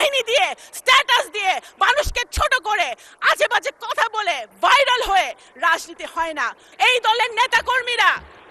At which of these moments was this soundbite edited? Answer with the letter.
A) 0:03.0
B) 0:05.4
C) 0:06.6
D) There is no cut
C